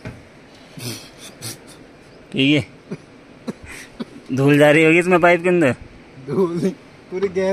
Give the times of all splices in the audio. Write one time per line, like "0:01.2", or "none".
none